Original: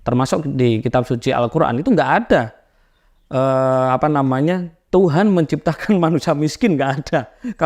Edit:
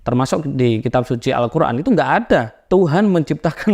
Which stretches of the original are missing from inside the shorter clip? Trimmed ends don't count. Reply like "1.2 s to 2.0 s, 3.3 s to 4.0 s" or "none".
2.5 s to 4.8 s